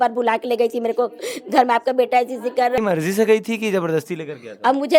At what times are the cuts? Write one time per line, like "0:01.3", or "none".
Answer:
0:02.8

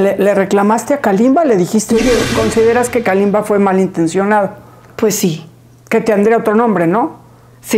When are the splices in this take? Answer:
0:02.3

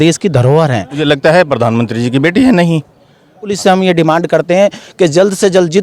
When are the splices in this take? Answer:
0:01.0
0:03.5

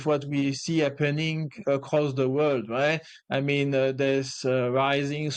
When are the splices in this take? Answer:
none

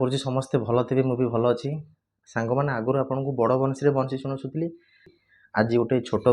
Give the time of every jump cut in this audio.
0:05.2

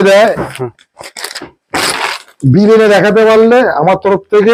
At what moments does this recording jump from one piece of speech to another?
none

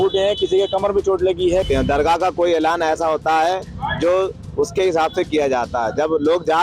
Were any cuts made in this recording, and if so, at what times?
0:01.6

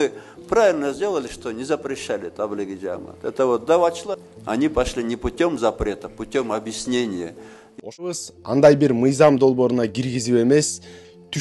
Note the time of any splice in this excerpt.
0:08.0

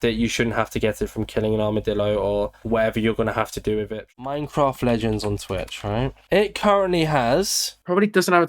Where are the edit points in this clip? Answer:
0:04.1

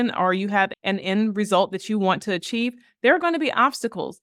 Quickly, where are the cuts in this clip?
none

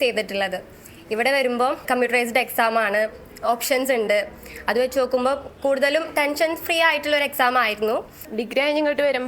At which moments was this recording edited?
0:01.8
0:08.3

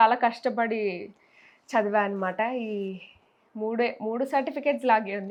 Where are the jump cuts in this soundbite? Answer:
none

